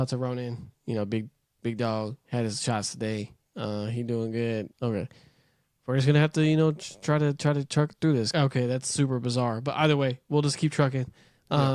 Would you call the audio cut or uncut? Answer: uncut